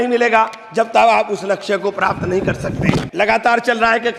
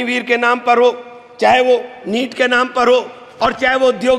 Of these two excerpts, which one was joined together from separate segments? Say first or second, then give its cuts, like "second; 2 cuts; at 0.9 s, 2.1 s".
first; 1 cut; at 3.1 s